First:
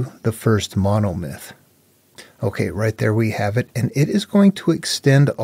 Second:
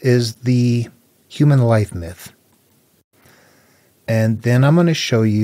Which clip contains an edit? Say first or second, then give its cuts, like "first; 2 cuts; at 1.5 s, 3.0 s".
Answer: second; 1 cut; at 2.9 s